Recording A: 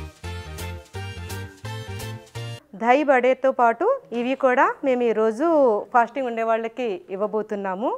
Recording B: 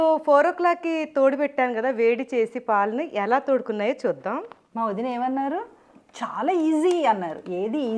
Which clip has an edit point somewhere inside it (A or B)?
B